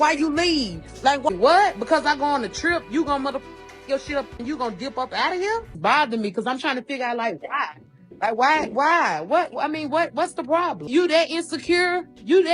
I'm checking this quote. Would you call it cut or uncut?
cut